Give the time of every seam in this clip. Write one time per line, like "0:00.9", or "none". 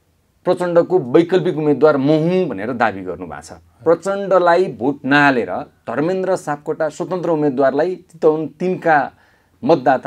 none

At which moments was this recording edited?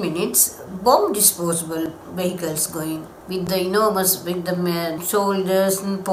0:03.1
0:05.0

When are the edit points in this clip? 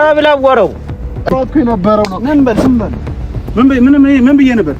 0:01.3

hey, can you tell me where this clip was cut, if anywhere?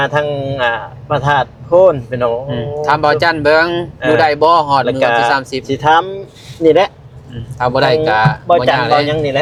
none

